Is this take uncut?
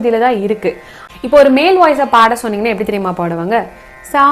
yes; 0 cuts

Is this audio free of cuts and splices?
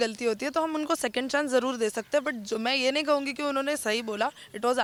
yes; 0 cuts

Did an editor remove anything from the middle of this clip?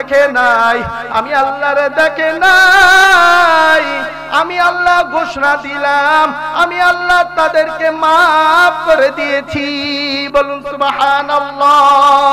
no; 0 cuts

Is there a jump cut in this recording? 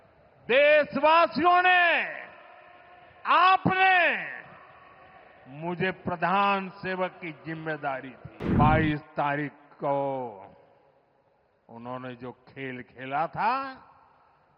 yes; 1 cut; at 8.5 s

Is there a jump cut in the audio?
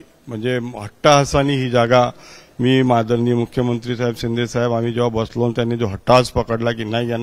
no; 0 cuts

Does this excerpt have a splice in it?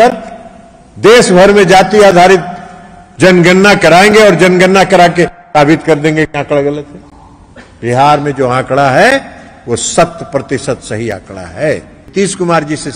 yes; 1 cut; at 12.0 s

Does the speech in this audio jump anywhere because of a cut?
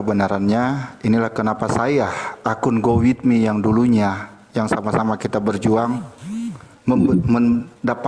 no; 0 cuts

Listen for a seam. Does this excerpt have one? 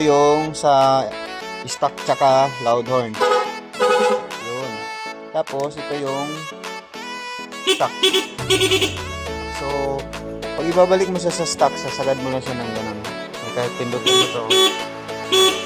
no; 0 cuts

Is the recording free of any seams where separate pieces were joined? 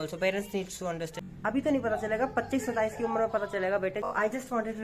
no; 2 cuts; at 1.2 s, 4.1 s

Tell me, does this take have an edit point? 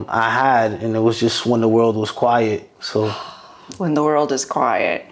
no; 0 cuts

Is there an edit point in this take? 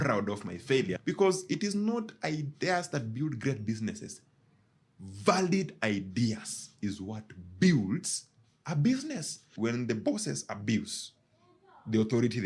yes; 2 cuts; at 1.0 s, 9.5 s

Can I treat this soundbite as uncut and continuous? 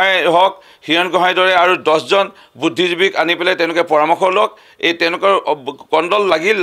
yes; 0 cuts

